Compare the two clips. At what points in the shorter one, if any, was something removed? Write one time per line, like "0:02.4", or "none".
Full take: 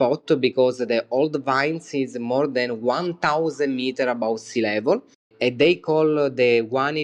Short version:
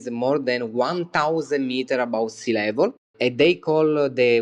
0:03.1